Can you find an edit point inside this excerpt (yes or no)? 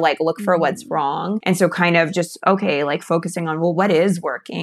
yes